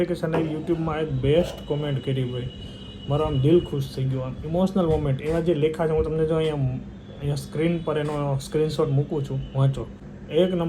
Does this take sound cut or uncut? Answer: uncut